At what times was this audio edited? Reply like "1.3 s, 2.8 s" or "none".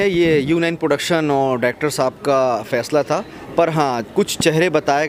none

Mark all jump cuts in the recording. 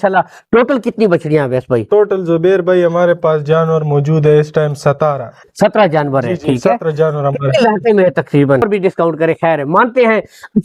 8.6 s

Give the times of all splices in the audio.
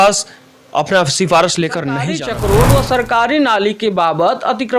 2.2 s

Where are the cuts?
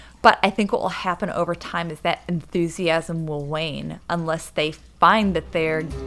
none

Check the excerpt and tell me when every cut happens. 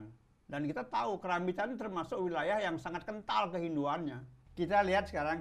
4.4 s

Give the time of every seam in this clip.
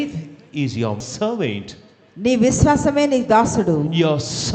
1.0 s

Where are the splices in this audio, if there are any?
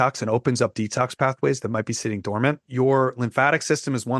2.7 s

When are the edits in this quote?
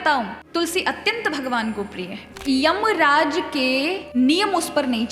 2.2 s, 4.0 s

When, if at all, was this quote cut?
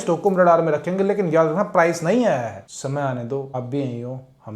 2.5 s, 3.5 s

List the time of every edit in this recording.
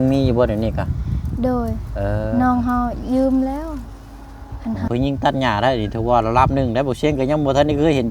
4.9 s

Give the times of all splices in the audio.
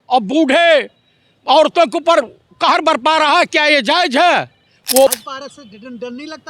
5.1 s

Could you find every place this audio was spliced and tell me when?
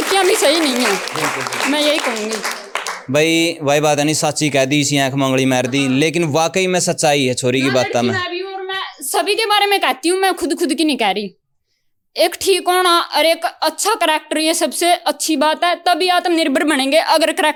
none

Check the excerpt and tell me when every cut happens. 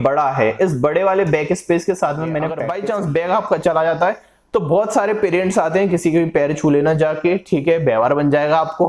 2.7 s

